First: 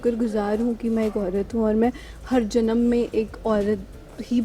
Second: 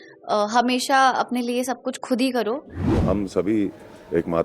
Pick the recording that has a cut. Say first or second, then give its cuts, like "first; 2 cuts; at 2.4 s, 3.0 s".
second; 1 cut; at 2.9 s